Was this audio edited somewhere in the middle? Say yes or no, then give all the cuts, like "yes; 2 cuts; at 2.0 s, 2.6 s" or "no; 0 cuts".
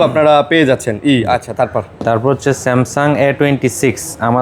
no; 0 cuts